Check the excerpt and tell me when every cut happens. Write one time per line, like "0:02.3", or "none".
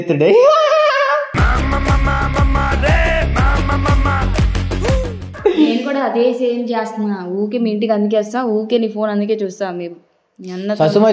none